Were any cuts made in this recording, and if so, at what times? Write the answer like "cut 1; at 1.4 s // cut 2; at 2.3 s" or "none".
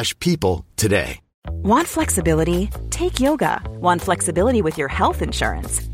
cut 1; at 1.4 s